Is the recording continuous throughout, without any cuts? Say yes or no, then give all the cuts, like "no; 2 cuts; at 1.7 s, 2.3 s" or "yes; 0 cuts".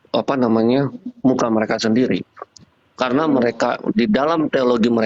yes; 0 cuts